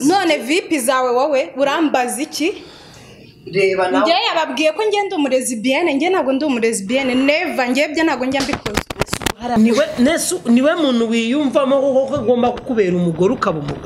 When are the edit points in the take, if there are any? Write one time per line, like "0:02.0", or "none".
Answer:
0:09.6